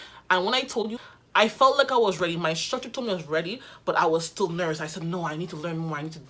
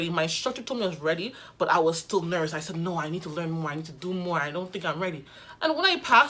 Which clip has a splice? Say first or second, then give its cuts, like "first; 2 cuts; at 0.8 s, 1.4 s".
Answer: first; 1 cut; at 1.0 s